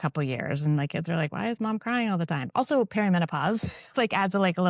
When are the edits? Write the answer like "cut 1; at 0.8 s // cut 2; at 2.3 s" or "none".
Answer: none